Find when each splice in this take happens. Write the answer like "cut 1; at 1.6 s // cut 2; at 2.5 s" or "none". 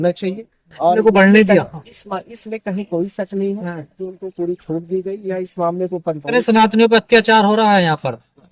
cut 1; at 1.0 s // cut 2; at 6.3 s